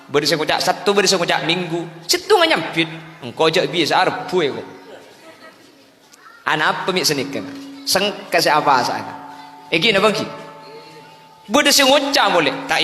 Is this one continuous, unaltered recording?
yes; 0 cuts

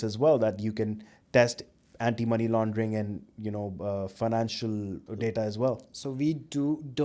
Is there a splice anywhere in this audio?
no; 0 cuts

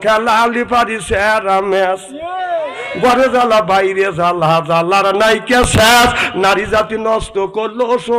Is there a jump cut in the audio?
no; 0 cuts

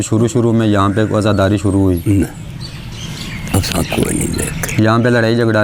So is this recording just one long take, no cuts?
yes; 0 cuts

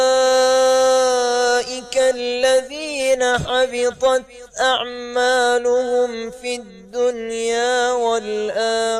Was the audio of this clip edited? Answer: yes; 1 cut; at 6.0 s

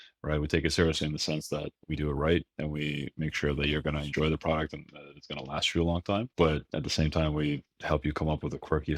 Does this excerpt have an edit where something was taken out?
no; 0 cuts

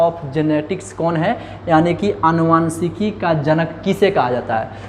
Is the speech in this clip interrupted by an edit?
no; 0 cuts

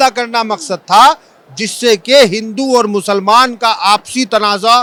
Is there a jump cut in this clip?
no; 0 cuts

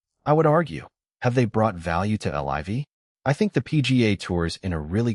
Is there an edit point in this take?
yes; 1 cut; at 3.0 s

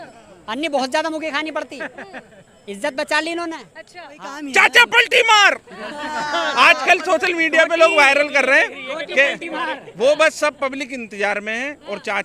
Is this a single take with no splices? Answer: no; 1 cut; at 4.2 s

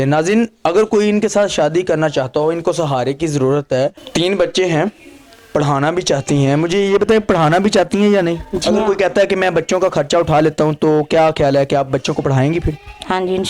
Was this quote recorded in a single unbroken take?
no; 1 cut; at 4.0 s

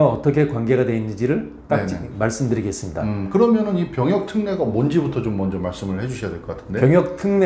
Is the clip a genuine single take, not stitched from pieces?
yes; 0 cuts

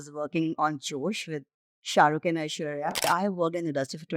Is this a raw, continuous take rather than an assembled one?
no; 1 cut; at 3.0 s

